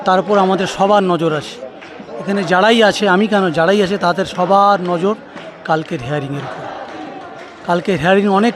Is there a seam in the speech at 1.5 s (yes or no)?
no